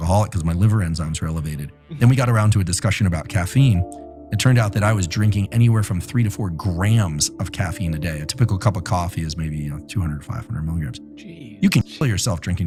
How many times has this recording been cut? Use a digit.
0